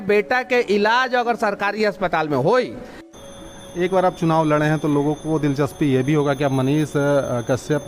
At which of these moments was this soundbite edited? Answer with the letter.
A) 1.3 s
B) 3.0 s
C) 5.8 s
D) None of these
B